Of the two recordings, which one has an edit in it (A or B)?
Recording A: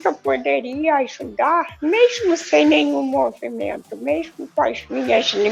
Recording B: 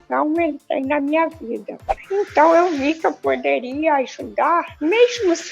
B